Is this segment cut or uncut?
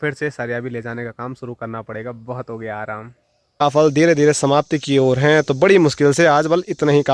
cut